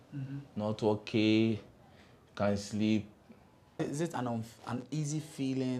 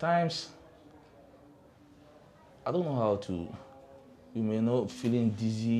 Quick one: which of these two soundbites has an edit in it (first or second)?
first